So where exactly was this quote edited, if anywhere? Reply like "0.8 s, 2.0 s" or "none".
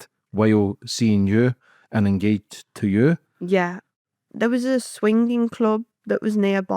4.0 s

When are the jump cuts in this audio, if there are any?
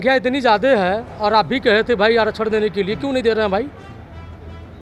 none

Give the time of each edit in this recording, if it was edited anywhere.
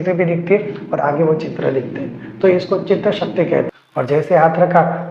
3.8 s

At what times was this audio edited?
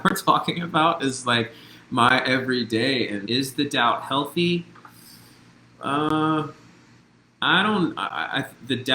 3.2 s

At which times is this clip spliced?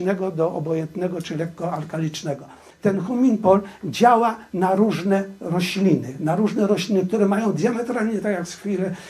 2.7 s

